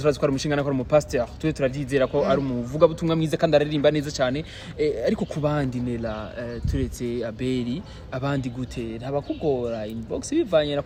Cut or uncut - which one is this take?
uncut